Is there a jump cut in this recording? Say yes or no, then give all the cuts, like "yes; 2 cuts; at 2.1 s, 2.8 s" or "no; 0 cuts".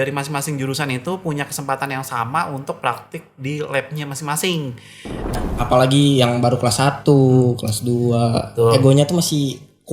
yes; 1 cut; at 5.3 s